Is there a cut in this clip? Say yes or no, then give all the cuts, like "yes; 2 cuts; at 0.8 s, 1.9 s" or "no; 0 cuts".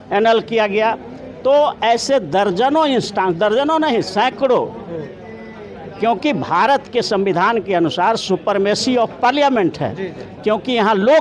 no; 0 cuts